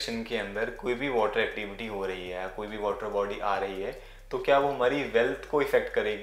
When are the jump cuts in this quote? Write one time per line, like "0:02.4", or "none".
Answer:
none